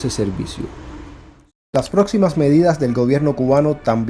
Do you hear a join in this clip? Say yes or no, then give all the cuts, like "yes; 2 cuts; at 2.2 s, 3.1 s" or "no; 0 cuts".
yes; 1 cut; at 1.4 s